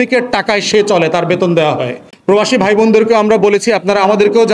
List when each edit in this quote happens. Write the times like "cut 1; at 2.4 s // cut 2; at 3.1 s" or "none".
cut 1; at 2.0 s